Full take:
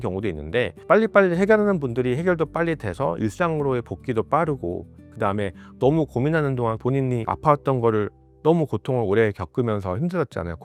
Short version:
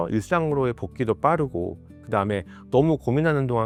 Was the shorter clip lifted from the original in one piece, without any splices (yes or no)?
yes